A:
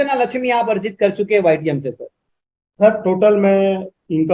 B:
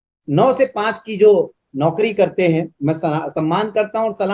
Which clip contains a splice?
B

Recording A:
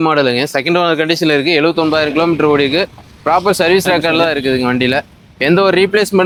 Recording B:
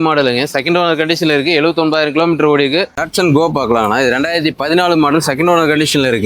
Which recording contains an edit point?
B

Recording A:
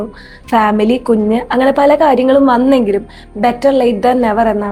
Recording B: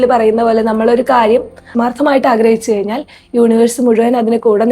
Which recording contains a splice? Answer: B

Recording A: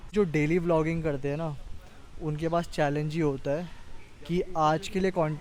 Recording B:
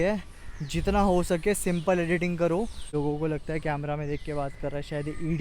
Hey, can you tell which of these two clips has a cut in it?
B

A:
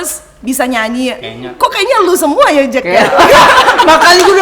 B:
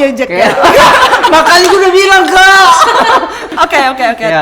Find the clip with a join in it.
B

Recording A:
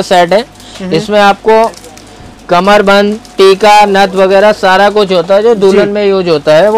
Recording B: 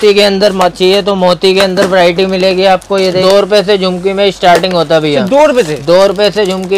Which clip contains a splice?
B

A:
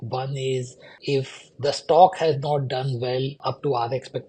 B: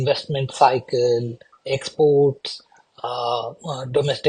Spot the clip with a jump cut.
A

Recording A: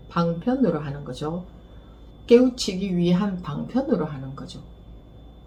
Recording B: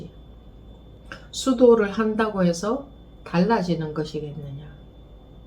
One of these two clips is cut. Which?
B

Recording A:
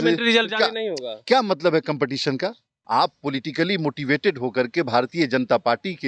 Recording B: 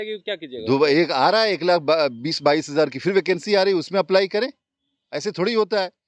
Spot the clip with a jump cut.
A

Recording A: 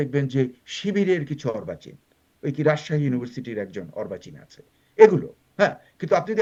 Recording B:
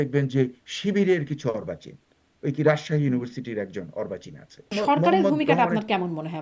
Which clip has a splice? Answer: B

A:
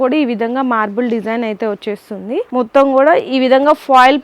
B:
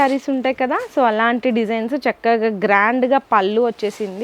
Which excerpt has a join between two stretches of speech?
A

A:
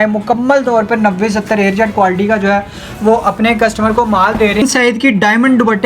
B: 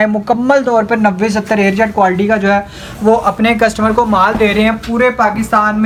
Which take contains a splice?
A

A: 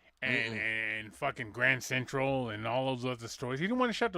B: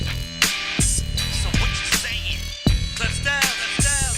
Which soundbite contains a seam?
A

